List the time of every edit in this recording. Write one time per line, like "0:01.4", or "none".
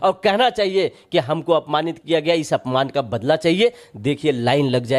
none

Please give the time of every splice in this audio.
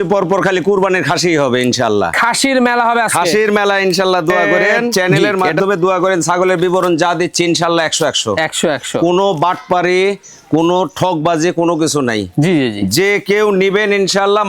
0:04.9

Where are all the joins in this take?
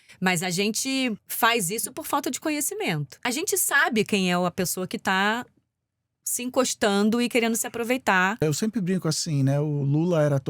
0:01.3
0:03.1
0:08.4

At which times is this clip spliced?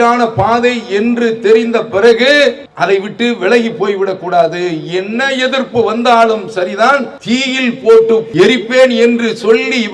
0:02.7
0:07.1
0:08.3

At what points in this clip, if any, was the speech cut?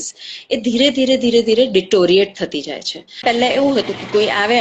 0:03.2

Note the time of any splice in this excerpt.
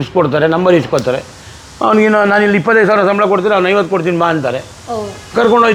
none

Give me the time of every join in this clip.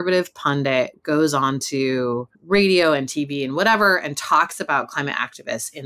0:02.3

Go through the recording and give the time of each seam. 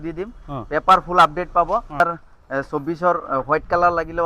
0:02.0

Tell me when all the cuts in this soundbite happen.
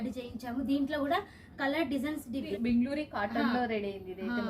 0:02.5

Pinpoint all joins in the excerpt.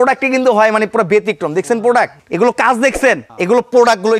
0:02.2
0:03.3

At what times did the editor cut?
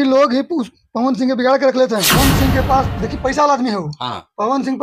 0:02.1

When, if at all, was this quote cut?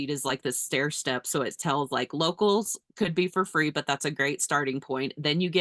none

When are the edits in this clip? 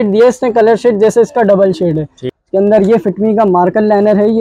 0:02.2

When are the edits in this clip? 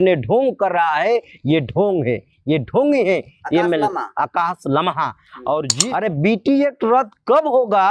0:05.7

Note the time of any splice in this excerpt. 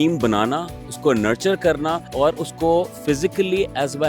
0:02.0

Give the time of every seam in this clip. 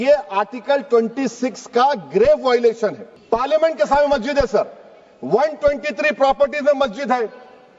0:03.1

